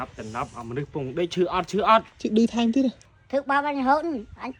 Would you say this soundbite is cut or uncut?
cut